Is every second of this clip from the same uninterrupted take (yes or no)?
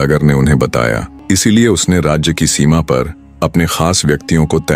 no